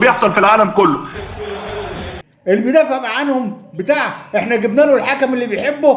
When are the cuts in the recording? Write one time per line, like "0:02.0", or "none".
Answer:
0:01.1
0:02.2